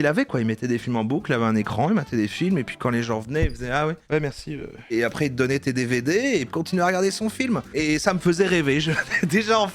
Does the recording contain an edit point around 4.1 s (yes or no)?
no